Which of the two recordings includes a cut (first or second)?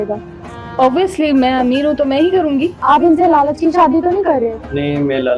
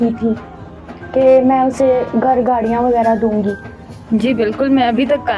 first